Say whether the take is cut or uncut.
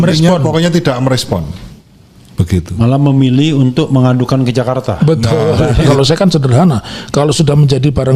cut